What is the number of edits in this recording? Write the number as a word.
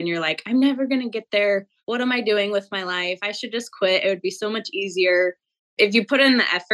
one